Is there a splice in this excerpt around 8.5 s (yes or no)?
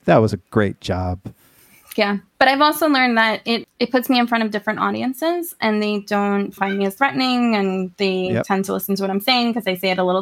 no